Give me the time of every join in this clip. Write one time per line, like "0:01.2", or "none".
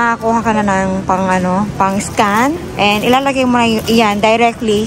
none